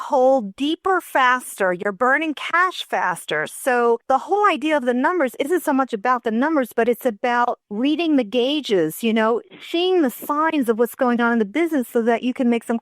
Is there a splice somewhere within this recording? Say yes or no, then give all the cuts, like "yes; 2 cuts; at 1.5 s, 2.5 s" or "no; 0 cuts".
yes; 1 cut; at 7.6 s